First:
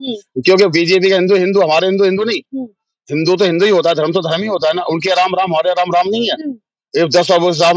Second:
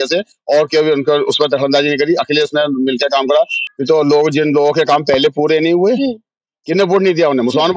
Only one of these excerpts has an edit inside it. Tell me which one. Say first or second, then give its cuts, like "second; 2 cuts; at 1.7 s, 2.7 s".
second; 1 cut; at 3.6 s